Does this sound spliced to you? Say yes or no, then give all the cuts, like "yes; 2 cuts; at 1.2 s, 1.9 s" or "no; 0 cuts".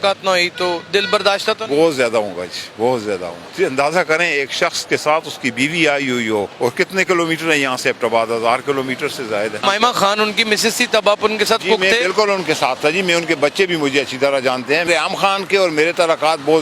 yes; 4 cuts; at 3.4 s, 6.5 s, 9.6 s, 14.9 s